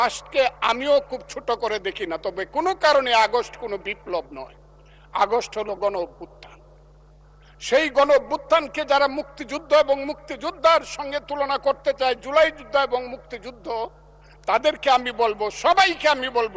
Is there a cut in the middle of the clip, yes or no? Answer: no